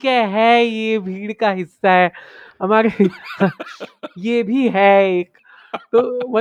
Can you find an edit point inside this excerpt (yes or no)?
no